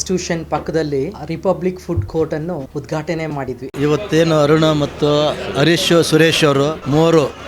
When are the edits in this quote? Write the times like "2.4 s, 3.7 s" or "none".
1.2 s, 2.7 s, 3.7 s